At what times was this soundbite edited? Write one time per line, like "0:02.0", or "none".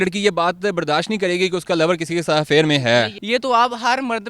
0:03.2